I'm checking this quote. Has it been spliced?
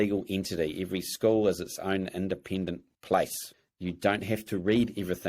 yes; 2 cuts; at 2.9 s, 3.4 s

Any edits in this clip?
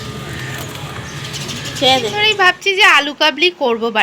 yes; 1 cut; at 2.3 s

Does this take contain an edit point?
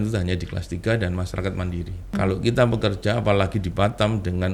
yes; 1 cut; at 2.1 s

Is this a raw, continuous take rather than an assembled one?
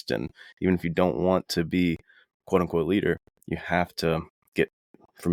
yes; 0 cuts

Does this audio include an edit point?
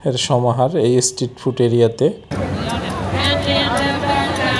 yes; 1 cut; at 2.2 s

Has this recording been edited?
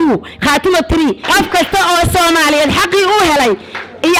yes; 1 cut; at 1.2 s

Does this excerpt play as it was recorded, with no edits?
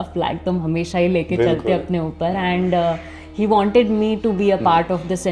yes; 0 cuts

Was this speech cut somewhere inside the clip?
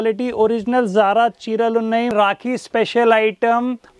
yes; 1 cut; at 2.1 s

